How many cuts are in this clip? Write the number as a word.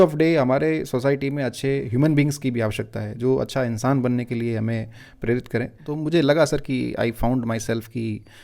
one